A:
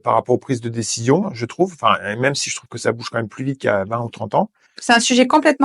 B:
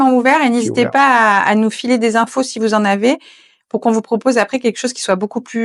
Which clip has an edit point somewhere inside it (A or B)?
A